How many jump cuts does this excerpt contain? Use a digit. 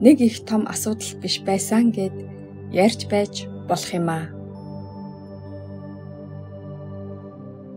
0